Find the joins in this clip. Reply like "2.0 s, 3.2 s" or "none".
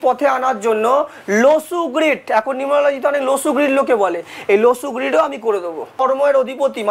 6.0 s

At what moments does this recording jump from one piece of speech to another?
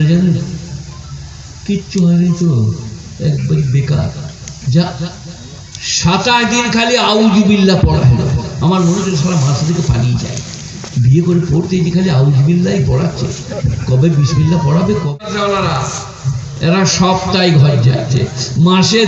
15.1 s

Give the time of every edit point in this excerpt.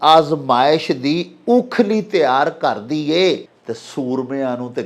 3.5 s

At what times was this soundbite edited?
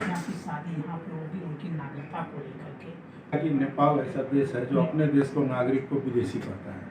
3.3 s

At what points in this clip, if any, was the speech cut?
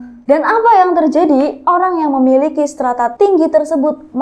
3.1 s

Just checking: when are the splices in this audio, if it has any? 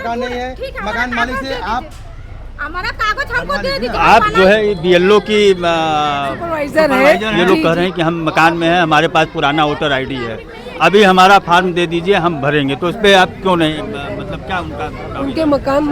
4.0 s, 7.4 s

